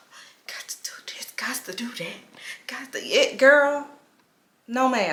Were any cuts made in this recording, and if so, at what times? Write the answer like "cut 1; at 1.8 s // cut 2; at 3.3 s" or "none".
none